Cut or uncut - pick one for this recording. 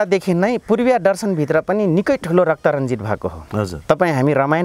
uncut